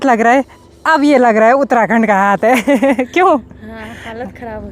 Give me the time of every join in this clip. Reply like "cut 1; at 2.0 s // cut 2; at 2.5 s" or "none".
none